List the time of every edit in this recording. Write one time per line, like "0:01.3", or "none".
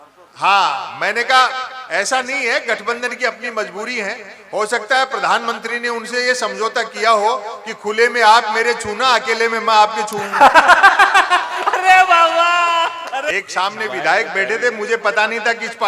0:13.3